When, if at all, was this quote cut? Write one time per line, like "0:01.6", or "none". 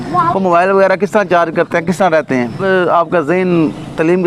0:02.6